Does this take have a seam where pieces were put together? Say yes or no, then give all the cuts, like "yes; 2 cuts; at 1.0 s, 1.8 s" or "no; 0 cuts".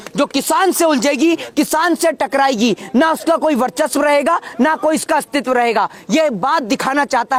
no; 0 cuts